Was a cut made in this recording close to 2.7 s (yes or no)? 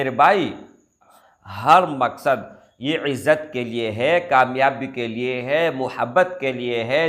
no